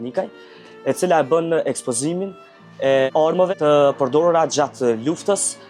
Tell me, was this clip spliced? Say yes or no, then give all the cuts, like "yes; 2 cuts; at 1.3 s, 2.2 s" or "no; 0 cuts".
yes; 1 cut; at 3.5 s